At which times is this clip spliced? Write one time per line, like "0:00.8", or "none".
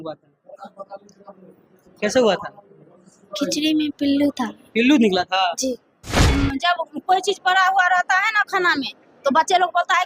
0:06.2

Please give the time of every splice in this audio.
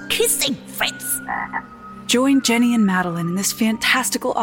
none

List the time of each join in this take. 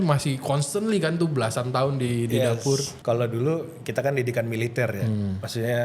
0:02.9

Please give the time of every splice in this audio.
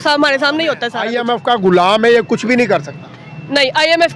0:00.9

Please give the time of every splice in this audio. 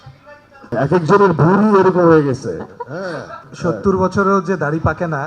0:00.7
0:03.5

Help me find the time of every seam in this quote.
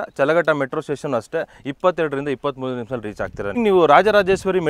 0:03.6

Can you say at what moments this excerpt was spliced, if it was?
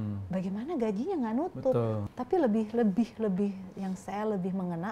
0:02.0

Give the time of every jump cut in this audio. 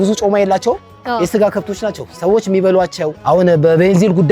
0:03.2

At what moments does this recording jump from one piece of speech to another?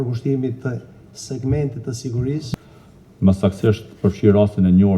0:02.5

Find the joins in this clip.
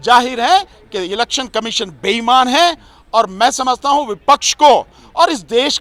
none

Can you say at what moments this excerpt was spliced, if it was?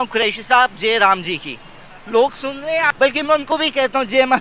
0:02.9

